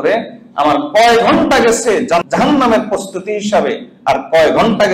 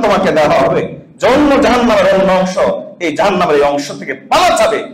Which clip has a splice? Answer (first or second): first